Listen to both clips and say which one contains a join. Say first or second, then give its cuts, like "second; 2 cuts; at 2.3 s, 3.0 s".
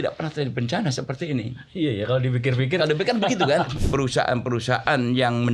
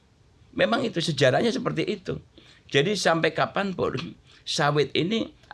first; 1 cut; at 3.8 s